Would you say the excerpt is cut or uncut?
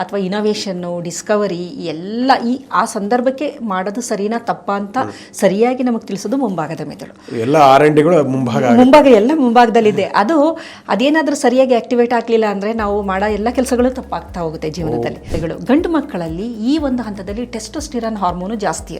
cut